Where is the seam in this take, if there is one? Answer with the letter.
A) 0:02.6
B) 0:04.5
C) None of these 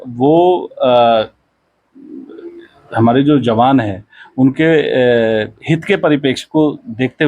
C